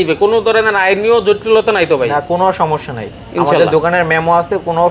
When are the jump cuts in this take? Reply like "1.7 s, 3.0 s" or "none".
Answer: none